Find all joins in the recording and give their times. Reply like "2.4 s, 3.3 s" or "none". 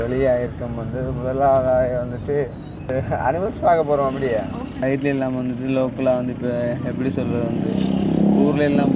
2.9 s, 4.7 s